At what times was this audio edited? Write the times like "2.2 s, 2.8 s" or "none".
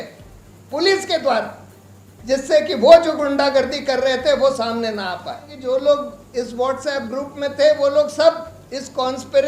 5.5 s